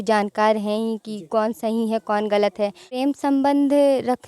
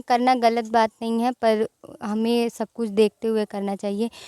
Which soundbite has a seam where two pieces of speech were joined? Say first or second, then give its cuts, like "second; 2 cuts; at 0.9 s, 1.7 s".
first; 1 cut; at 2.9 s